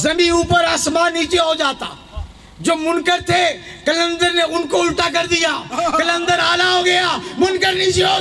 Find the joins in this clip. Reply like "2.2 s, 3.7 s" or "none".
none